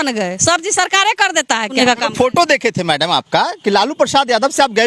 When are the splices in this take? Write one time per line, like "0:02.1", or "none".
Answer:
0:01.7